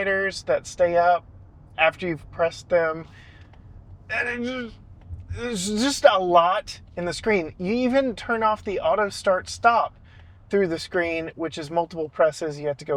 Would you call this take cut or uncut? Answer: uncut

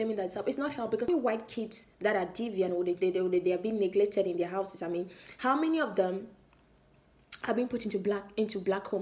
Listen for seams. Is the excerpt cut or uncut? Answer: cut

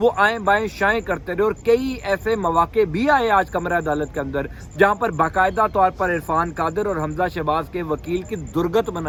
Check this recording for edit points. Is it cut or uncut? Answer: uncut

